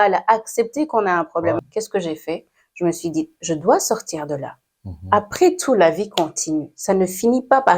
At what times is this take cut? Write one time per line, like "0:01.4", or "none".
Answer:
0:01.6